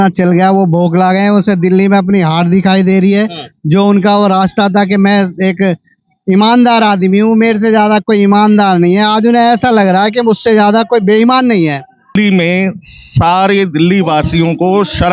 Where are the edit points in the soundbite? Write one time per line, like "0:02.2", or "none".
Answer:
0:12.1